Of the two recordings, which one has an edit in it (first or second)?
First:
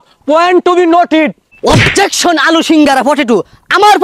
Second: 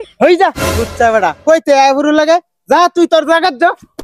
first